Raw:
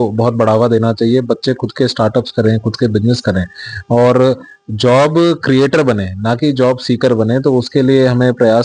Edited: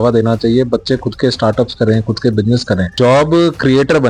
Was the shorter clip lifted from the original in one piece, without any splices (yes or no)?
no